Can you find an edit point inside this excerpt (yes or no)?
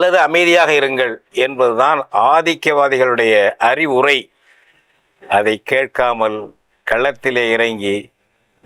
no